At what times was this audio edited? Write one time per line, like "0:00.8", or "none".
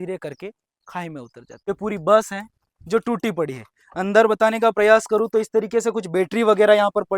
0:01.7